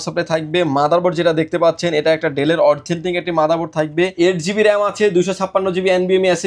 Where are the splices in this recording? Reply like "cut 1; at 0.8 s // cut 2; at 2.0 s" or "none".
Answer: cut 1; at 4.1 s